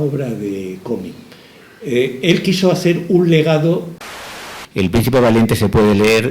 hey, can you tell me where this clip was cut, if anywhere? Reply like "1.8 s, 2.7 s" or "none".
4.2 s

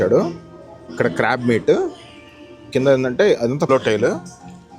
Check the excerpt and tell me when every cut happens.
3.7 s

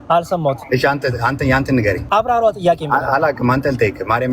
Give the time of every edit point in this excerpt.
2.0 s

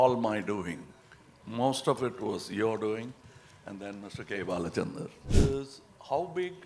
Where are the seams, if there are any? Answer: 5.2 s

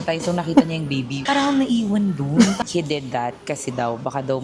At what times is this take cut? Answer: 1.3 s, 2.6 s

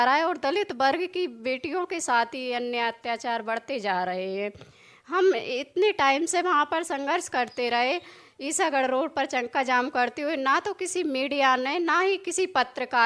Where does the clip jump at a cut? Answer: 3.4 s

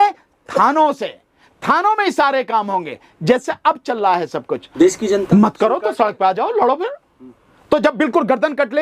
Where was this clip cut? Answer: 4.6 s

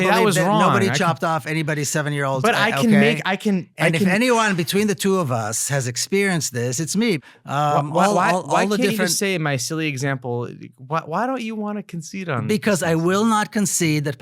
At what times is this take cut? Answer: 7.3 s

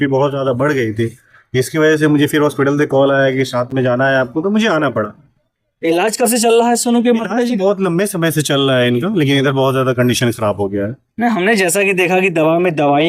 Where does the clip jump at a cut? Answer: none

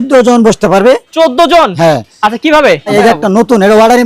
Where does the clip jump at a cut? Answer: 2.9 s

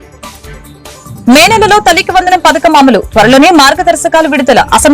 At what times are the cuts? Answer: 1.0 s

